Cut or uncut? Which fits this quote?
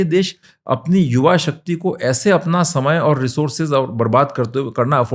uncut